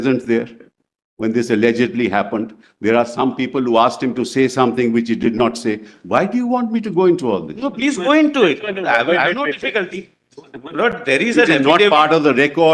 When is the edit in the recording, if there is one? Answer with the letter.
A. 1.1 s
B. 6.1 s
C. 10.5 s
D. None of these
D